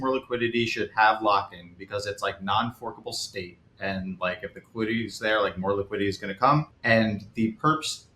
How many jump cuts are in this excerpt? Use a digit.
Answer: 1